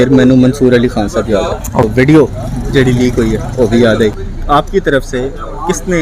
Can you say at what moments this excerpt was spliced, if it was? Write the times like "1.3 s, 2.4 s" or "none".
1.7 s, 4.2 s

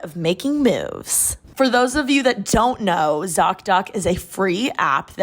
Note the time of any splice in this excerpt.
1.4 s

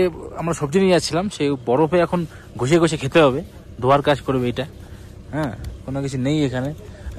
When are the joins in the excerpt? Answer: none

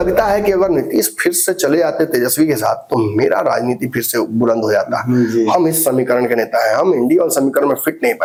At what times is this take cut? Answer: none

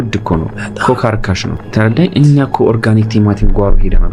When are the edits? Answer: 1.6 s

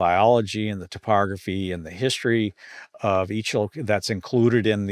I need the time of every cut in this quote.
none

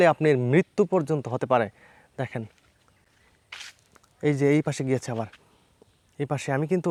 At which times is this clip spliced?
none

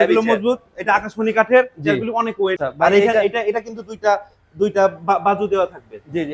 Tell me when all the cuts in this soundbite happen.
2.7 s

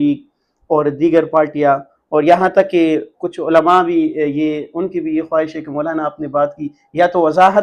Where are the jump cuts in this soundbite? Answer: none

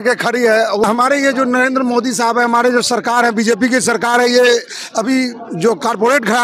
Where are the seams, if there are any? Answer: none

